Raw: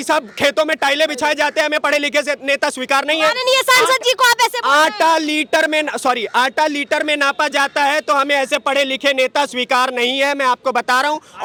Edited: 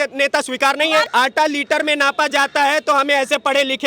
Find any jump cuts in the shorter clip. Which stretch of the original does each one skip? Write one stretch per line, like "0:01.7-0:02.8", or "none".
0:03.4-0:06.3